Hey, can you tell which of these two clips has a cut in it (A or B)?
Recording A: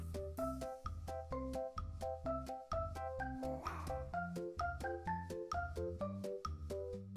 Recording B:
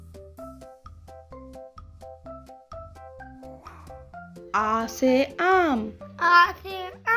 B